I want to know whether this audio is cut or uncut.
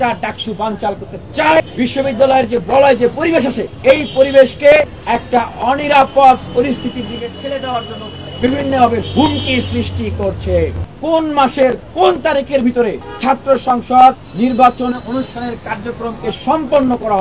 cut